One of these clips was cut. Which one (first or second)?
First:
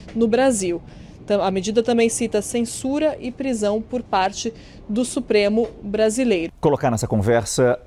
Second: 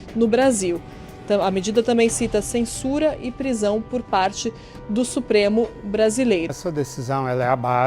second